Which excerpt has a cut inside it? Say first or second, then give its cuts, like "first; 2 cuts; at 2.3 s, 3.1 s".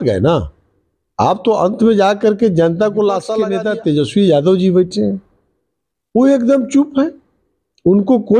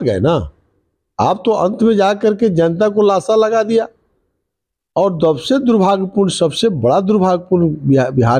first; 1 cut; at 3.4 s